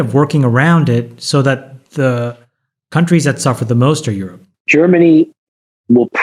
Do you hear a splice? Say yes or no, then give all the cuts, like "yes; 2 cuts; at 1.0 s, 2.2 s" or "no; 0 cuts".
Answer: yes; 1 cut; at 4.5 s